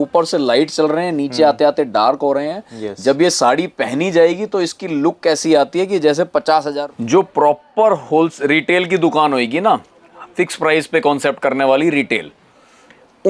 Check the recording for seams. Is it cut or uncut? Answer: cut